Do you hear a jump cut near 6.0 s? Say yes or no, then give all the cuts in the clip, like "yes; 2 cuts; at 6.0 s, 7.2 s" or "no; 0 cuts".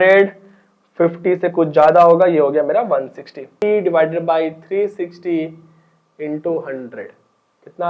no; 1 cut; at 3.6 s